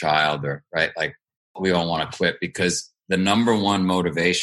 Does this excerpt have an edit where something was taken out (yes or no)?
yes